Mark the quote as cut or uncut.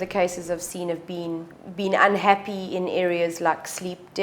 cut